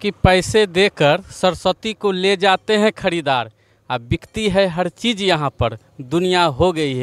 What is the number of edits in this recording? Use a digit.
0